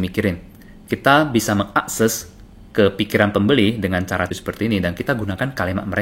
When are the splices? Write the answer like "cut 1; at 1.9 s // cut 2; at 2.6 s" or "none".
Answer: cut 1; at 4.3 s

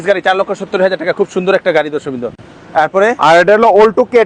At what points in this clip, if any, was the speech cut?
none

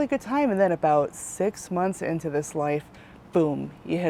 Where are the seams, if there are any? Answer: none

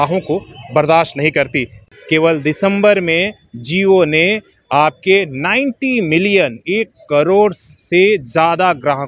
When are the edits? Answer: cut 1; at 1.8 s

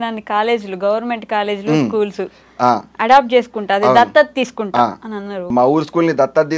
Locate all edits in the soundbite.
cut 1; at 5.5 s

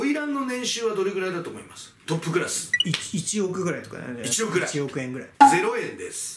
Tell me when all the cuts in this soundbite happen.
cut 1; at 1.9 s // cut 2; at 5.2 s

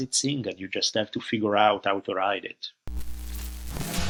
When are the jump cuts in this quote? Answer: none

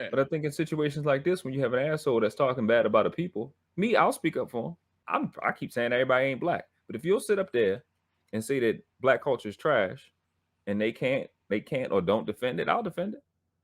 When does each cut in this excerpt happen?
cut 1; at 4.9 s

